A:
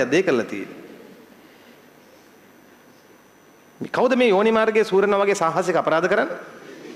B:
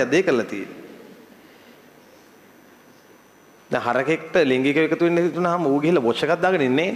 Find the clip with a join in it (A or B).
B